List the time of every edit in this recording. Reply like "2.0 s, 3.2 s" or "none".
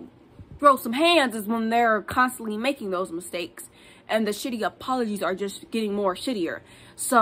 none